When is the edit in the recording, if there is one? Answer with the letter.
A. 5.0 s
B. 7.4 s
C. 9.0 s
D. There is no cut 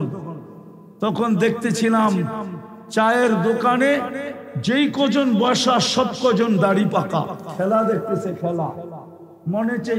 B